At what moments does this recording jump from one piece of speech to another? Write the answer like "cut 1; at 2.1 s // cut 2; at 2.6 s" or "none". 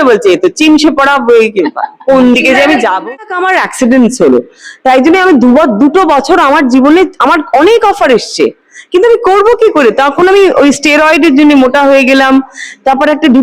cut 1; at 3.2 s